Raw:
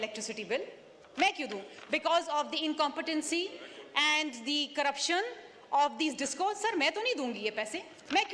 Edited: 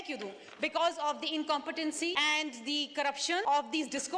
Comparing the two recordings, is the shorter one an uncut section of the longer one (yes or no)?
no